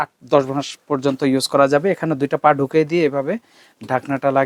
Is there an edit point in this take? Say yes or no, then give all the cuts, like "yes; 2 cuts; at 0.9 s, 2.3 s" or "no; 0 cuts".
no; 0 cuts